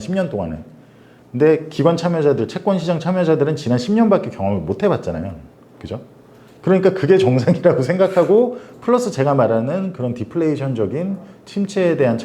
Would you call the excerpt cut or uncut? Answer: uncut